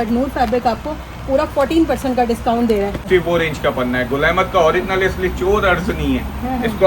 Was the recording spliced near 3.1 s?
yes; 1 cut; at 3.1 s

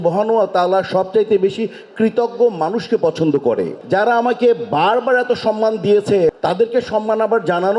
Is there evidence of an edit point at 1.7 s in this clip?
no; 1 cut; at 6.3 s

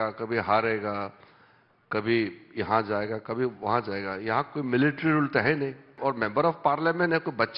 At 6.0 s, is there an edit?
yes; 1 cut; at 6.0 s

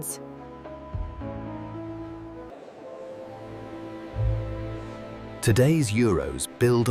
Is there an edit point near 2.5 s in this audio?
yes; 1 cut; at 2.5 s

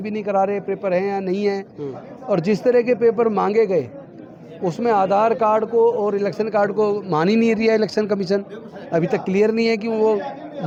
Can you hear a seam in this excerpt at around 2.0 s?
no; 0 cuts

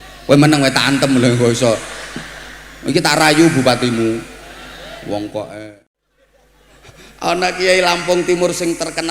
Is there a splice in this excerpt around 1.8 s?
no; 1 cut; at 5.6 s

